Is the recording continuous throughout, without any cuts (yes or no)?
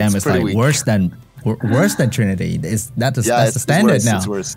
yes